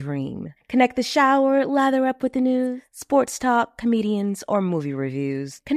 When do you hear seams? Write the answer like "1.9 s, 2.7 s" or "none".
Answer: none